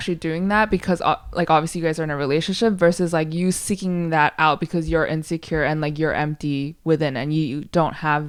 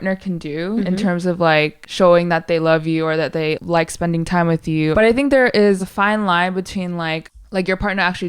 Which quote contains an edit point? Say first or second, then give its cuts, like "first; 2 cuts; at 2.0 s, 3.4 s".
second; 6 cuts; at 0.8 s, 1.8 s, 3.6 s, 4.9 s, 5.9 s, 7.2 s